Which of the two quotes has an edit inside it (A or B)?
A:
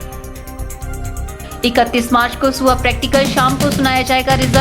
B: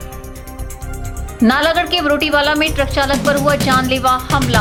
A